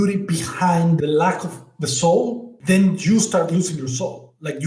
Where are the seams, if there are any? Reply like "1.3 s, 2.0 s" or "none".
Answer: 1.0 s, 2.5 s